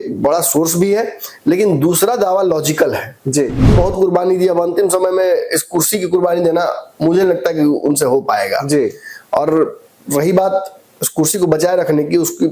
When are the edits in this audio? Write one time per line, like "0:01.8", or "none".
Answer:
0:03.7